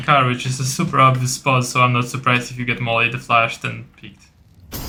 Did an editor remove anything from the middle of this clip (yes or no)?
no